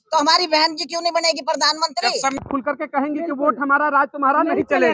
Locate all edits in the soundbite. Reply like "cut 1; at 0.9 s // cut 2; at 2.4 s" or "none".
cut 1; at 2.4 s